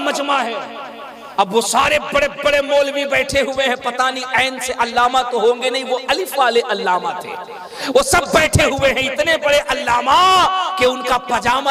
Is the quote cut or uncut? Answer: uncut